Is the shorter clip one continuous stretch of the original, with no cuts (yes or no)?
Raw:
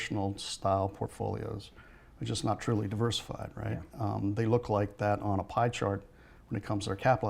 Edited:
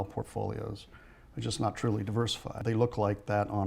no